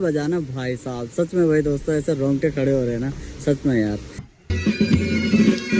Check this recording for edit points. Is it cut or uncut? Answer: cut